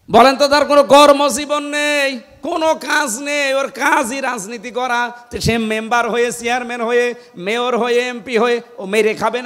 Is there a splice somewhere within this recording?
no; 0 cuts

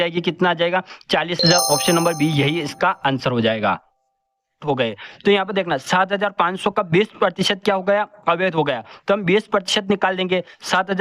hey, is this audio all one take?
no; 1 cut; at 4.6 s

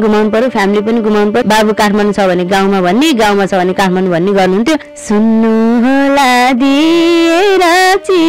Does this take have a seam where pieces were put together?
yes; 2 cuts; at 1.4 s, 4.9 s

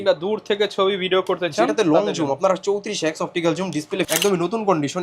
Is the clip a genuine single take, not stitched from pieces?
no; 1 cut; at 4.1 s

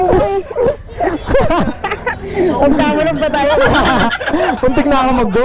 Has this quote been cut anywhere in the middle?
no; 0 cuts

